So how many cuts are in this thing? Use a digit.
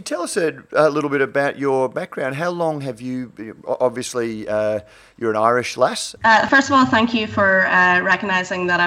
1